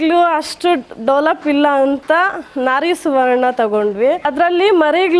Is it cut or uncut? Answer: cut